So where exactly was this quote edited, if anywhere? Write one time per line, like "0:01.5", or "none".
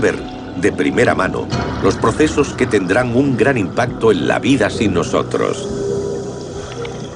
0:03.1